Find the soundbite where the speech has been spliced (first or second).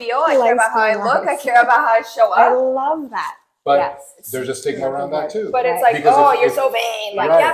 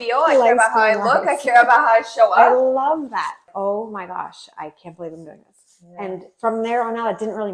second